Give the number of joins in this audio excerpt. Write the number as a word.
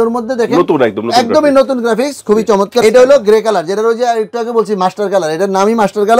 one